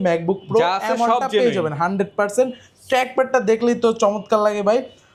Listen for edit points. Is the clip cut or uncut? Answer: uncut